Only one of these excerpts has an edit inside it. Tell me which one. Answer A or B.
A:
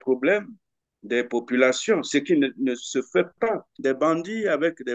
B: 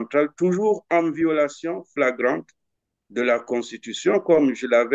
A